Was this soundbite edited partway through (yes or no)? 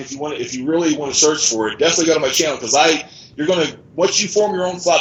no